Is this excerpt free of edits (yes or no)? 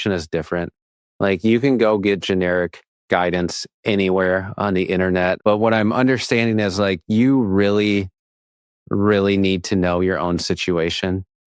no